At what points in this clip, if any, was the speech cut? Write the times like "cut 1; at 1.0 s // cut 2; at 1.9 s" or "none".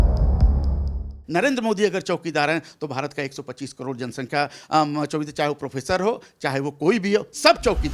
cut 1; at 1.1 s